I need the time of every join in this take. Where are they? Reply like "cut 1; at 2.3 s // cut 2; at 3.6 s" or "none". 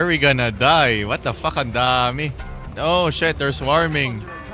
none